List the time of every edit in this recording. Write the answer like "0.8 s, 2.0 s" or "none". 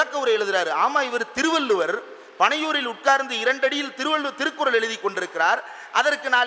none